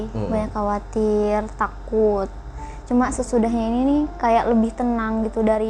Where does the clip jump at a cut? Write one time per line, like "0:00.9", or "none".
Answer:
none